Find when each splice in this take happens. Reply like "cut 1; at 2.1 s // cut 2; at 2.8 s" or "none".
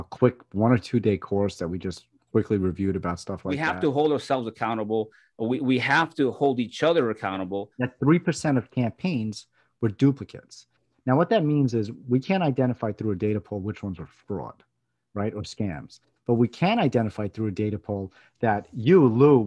cut 1; at 3.6 s // cut 2; at 7.7 s